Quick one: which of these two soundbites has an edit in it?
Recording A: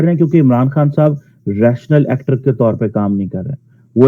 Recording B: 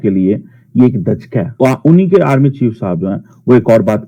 B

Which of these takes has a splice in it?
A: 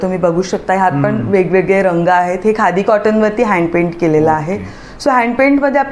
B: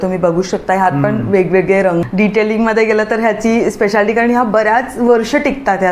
B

